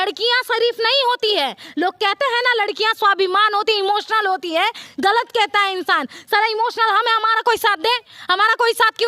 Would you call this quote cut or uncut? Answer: uncut